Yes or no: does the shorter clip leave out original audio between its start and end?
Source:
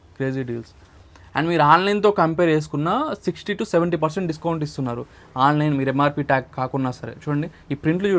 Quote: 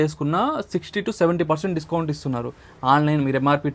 no